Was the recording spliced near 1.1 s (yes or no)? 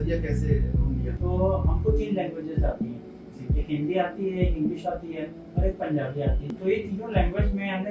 yes